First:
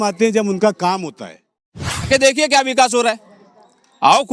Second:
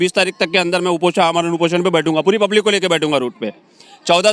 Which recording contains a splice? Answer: first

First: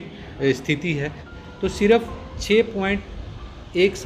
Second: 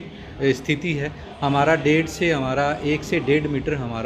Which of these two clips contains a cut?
first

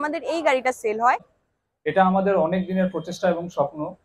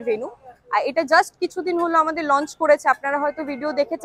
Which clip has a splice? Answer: first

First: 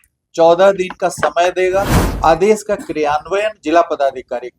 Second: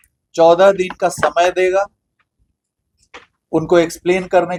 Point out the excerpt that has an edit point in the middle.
first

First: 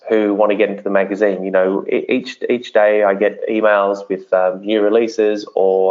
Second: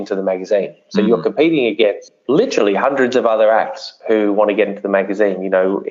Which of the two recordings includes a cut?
second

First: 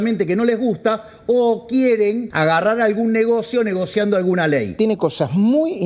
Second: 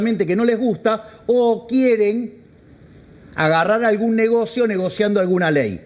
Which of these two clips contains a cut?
first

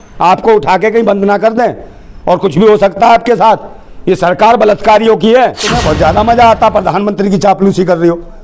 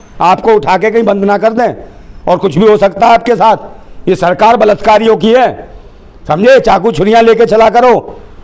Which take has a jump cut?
first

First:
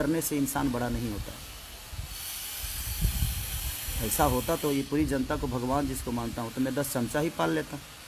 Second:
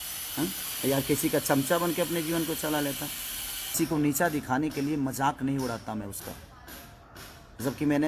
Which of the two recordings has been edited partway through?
second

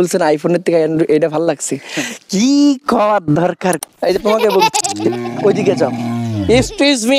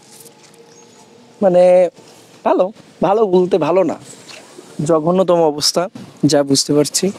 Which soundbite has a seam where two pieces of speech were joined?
first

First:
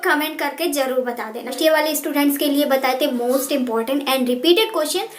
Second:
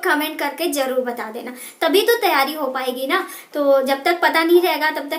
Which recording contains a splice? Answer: first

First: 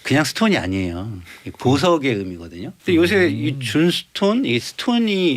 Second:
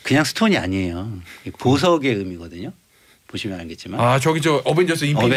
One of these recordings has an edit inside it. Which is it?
first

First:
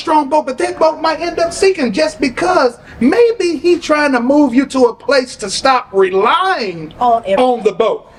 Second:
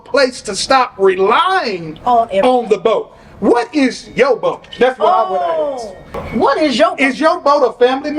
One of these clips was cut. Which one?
second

